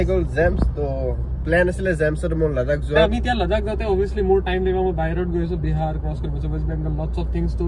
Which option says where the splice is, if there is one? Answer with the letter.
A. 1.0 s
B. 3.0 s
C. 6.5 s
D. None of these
B